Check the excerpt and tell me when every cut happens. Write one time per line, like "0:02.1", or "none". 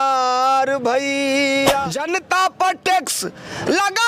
0:02.0